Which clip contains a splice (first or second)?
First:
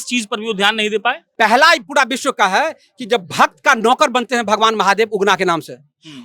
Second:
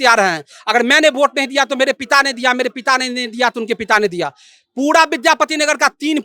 first